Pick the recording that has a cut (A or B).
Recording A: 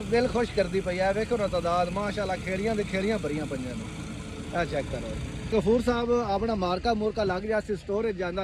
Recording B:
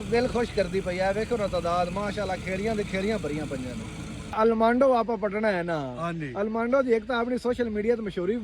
B